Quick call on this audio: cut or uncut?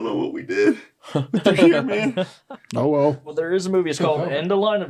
cut